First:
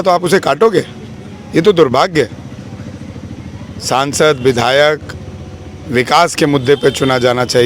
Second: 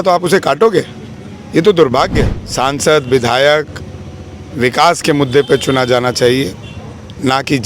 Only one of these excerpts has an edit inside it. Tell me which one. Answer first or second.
second